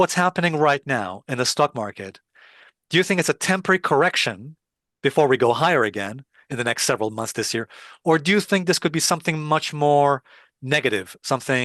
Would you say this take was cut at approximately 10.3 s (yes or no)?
no